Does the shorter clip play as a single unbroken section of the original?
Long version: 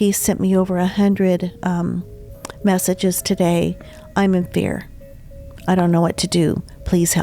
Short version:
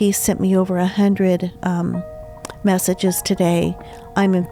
yes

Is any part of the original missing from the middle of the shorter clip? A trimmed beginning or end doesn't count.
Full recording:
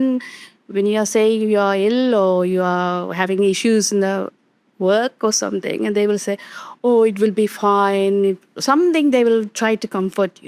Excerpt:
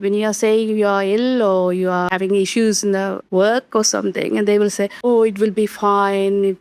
yes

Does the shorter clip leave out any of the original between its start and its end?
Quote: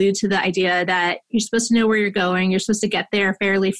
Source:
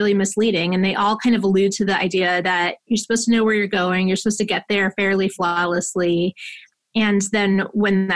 no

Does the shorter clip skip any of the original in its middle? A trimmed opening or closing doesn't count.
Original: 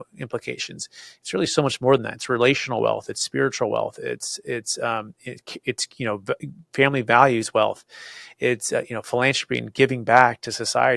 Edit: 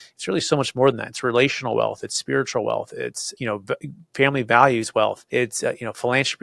yes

